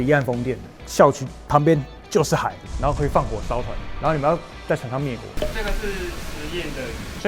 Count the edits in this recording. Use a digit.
2